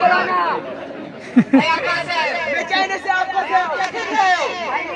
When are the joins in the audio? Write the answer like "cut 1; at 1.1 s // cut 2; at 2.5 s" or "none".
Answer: cut 1; at 3.8 s